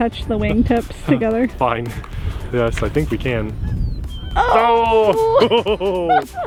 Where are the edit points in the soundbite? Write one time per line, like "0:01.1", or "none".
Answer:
none